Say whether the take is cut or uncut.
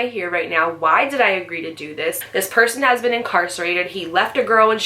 cut